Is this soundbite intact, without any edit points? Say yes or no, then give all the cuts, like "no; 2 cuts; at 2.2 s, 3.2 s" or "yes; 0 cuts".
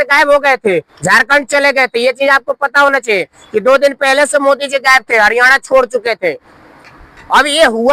yes; 0 cuts